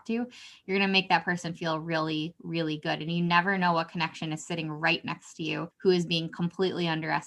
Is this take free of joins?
no; 1 cut; at 5.7 s

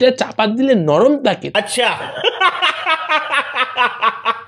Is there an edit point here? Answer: yes; 1 cut; at 1.4 s

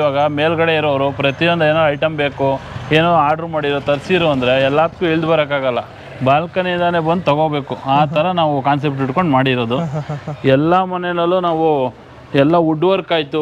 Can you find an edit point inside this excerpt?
no; 0 cuts

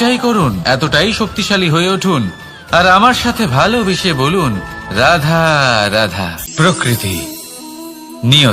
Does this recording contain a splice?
yes; 1 cut; at 6.4 s

